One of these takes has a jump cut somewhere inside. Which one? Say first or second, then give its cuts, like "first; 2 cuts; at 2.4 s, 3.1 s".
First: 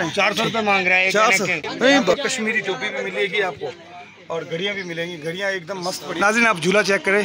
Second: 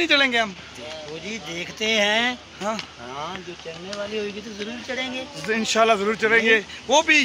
first; 2 cuts; at 2.1 s, 6.2 s